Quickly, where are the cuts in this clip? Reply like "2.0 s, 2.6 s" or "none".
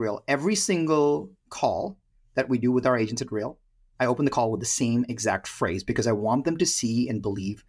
none